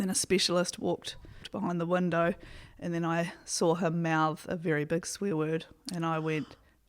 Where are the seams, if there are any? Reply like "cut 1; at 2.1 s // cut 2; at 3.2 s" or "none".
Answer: cut 1; at 1.5 s